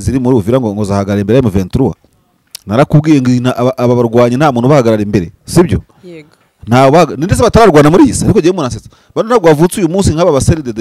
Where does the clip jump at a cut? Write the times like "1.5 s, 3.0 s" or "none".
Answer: none